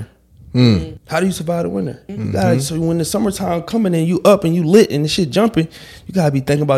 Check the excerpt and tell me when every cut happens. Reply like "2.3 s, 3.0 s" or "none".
1.0 s, 2.0 s